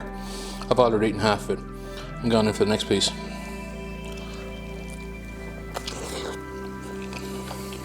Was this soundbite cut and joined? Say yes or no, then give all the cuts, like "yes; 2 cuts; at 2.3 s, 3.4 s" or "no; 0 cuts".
no; 0 cuts